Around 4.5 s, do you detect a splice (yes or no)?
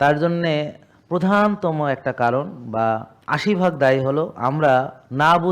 no